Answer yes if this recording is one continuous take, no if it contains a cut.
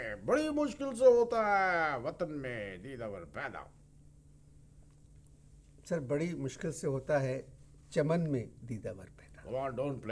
yes